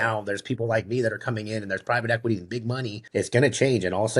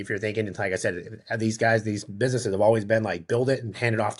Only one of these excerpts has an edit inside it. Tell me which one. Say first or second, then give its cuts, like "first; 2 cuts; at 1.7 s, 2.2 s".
first; 1 cut; at 2.9 s